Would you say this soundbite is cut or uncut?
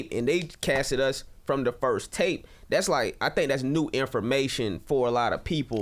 uncut